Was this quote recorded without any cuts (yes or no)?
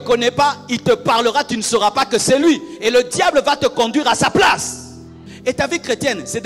no